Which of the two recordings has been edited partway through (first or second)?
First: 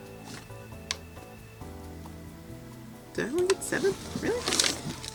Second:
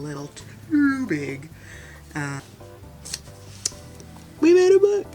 second